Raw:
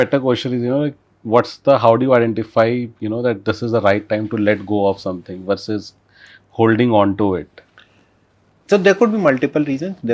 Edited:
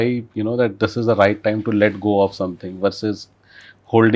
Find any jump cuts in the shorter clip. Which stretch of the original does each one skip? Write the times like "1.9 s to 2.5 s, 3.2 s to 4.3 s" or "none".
none